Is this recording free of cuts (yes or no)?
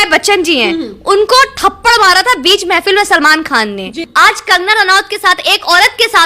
no